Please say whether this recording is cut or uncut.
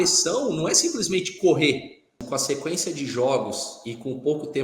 cut